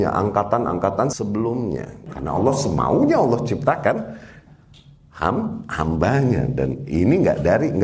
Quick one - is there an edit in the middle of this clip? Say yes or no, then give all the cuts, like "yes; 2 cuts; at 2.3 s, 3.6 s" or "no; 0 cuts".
yes; 2 cuts; at 1.1 s, 2.0 s